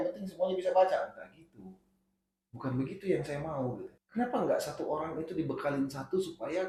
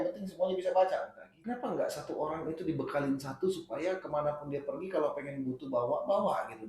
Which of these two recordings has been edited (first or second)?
second